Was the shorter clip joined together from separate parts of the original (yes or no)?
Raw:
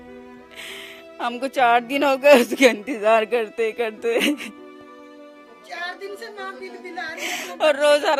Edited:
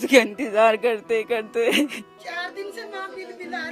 yes